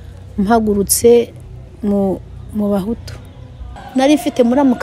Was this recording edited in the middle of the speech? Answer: yes; 1 cut; at 3.8 s

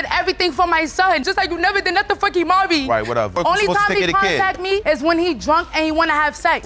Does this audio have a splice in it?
no; 0 cuts

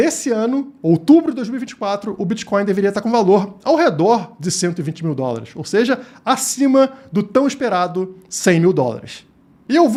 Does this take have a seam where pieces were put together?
no; 0 cuts

